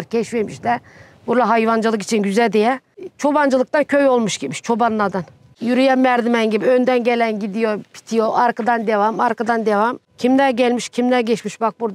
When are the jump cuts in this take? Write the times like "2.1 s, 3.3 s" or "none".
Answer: 5.5 s, 10.0 s